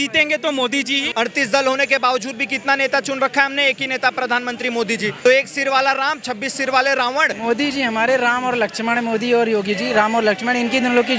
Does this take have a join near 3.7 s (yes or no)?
no